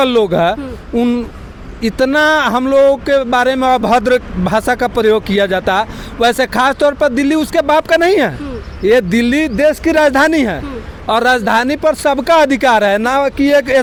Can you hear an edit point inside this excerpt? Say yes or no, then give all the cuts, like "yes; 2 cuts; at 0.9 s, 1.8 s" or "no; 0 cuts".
no; 0 cuts